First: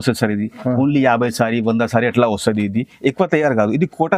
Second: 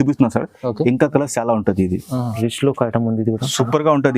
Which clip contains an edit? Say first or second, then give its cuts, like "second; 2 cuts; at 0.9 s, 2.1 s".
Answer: second; 1 cut; at 2.3 s